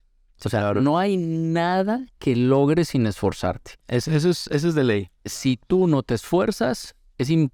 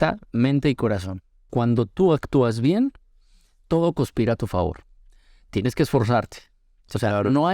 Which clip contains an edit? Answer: second; 1 cut; at 1.5 s

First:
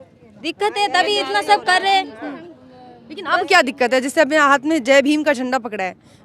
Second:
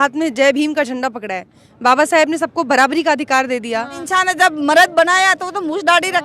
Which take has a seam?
second; 1 cut; at 4.0 s

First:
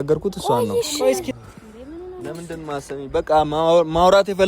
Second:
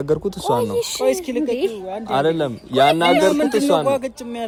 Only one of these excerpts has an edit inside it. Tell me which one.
first; 1 cut; at 1.3 s

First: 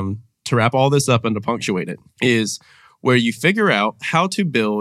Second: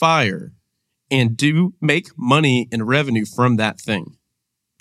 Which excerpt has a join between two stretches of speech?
first; 1 cut; at 2.0 s

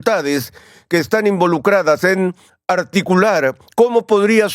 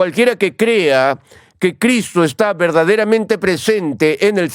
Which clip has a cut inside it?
first; 1 cut; at 2.5 s

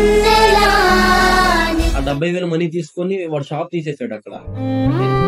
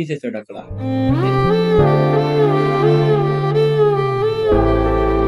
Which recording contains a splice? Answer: first; 1 cut; at 1.9 s

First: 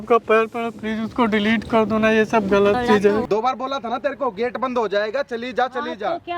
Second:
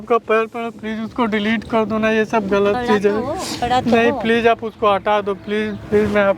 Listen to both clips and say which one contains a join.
first; 1 cut; at 3.2 s

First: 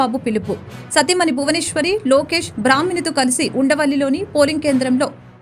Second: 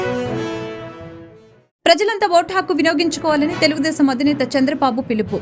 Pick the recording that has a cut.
second; 1 cut; at 1.2 s

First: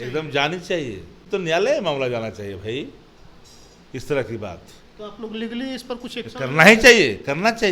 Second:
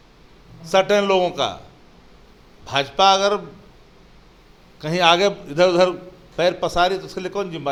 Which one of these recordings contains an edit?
first; 1 cut; at 1.2 s

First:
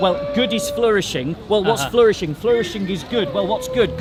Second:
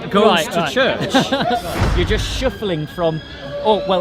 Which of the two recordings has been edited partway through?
second; 1 cut; at 1.8 s

